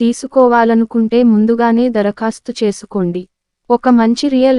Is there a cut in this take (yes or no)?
yes